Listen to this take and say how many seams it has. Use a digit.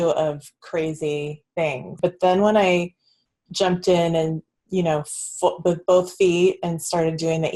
1